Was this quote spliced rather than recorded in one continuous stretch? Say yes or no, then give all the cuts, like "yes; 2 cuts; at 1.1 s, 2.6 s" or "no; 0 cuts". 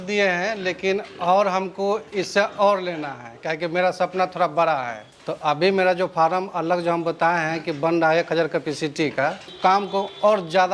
yes; 1 cut; at 9.5 s